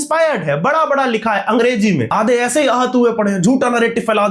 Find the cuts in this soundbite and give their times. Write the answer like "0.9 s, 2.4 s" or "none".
2.1 s